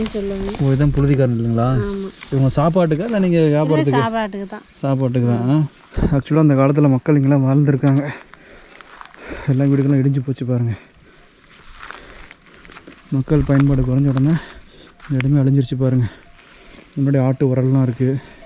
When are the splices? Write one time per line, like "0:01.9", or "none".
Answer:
0:05.7